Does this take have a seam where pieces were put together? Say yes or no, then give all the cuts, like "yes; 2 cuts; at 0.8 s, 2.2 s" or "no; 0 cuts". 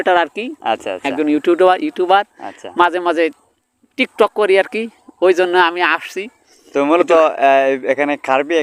no; 0 cuts